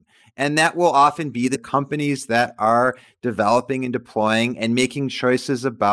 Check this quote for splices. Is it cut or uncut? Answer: uncut